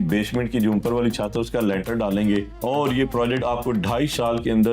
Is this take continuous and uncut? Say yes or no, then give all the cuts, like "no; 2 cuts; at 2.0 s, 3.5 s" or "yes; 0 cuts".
no; 1 cut; at 2.5 s